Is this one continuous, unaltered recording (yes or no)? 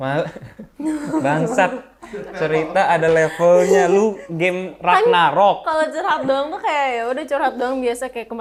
yes